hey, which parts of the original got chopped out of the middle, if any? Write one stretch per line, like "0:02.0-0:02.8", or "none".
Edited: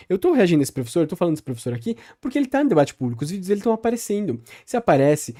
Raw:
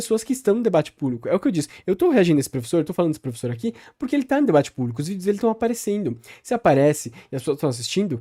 none